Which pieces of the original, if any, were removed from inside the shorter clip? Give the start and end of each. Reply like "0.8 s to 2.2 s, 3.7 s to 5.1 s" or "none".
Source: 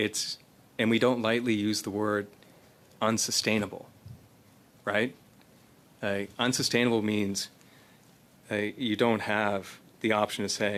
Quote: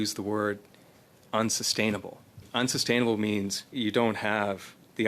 4.1 s to 6.3 s, 7.5 s to 8.7 s